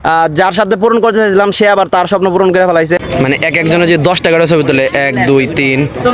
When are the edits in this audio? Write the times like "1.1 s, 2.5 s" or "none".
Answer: 3.0 s

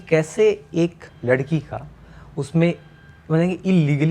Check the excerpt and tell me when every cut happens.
1.1 s

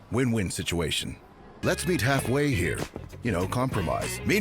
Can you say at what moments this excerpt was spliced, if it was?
1.5 s

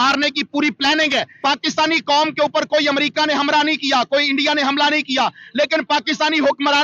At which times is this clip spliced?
1.3 s

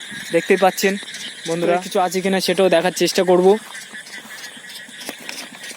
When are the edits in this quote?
1.9 s

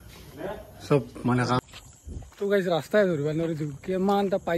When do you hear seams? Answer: 1.6 s

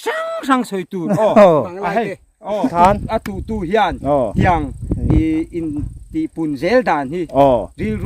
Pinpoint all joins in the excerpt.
2.7 s

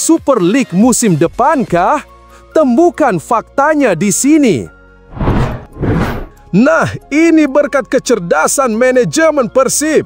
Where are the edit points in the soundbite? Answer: 4.9 s

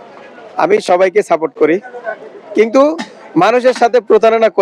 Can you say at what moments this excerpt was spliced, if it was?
none

